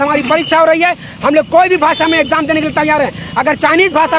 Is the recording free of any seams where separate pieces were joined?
yes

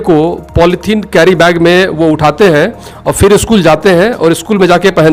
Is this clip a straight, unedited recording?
yes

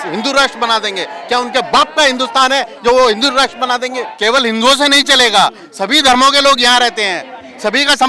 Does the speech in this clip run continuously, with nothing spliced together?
no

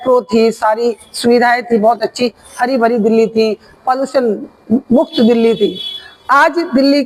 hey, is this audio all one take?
yes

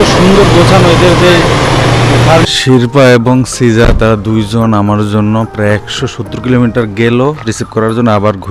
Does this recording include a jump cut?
yes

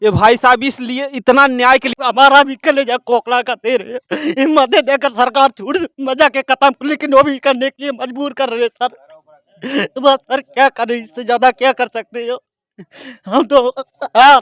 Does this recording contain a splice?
yes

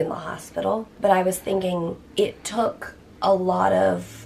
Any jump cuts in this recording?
yes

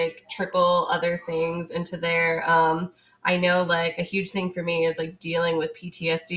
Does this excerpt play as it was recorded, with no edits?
yes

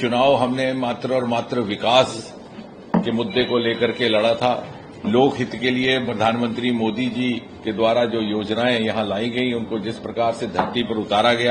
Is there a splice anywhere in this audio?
no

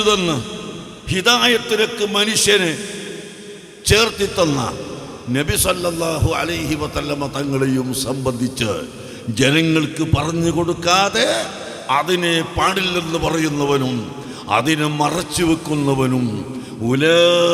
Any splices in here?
no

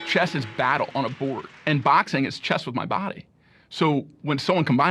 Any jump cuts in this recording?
yes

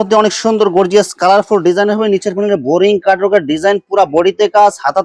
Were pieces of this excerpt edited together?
no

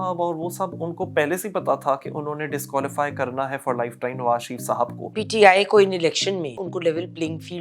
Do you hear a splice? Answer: yes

